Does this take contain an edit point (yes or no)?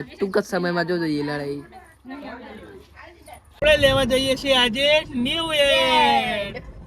yes